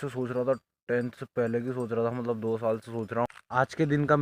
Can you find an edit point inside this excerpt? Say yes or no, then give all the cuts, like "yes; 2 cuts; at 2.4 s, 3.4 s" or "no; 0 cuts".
yes; 1 cut; at 3.3 s